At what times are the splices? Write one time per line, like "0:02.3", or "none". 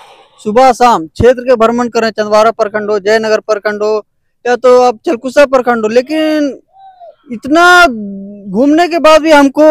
none